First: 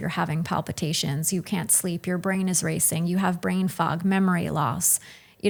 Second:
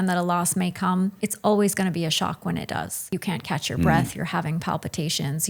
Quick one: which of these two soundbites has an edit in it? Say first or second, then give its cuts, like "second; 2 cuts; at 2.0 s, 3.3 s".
second; 2 cuts; at 1.2 s, 3.1 s